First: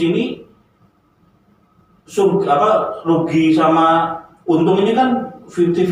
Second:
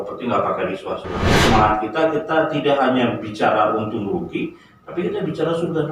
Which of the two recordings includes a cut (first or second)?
second